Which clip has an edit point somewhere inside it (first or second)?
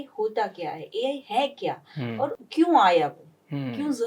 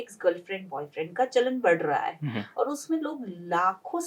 first